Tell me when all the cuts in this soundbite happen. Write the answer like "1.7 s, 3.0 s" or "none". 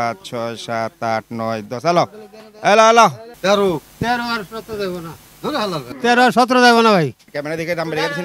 3.3 s, 7.2 s